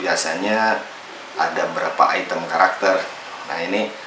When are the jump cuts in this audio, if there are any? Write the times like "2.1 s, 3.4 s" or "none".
none